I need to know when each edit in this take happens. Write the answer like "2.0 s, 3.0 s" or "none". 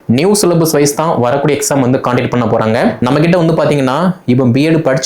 3.0 s